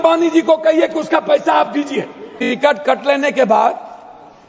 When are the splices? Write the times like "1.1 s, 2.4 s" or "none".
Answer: 2.3 s